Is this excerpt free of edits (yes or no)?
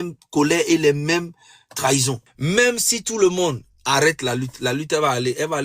no